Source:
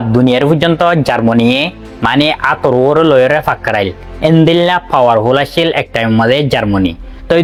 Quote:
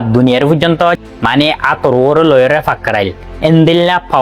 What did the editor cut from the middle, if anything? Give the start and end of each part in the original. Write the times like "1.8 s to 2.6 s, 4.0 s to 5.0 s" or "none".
1.0 s to 1.8 s